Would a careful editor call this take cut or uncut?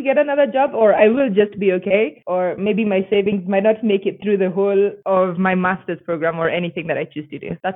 uncut